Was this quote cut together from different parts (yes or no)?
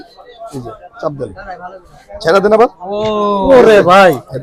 no